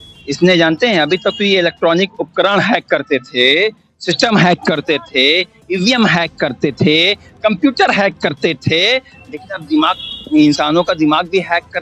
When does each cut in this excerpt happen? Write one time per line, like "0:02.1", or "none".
none